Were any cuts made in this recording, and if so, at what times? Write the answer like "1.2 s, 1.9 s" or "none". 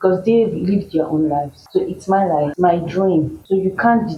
1.6 s, 2.5 s, 3.4 s